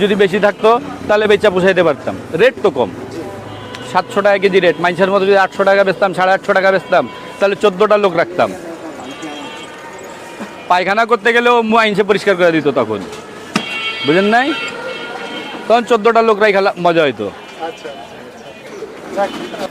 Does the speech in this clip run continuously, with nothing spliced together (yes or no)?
yes